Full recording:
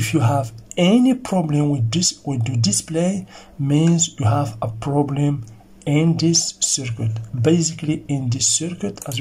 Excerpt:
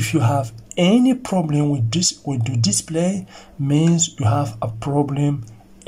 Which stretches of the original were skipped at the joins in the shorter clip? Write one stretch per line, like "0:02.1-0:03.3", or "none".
none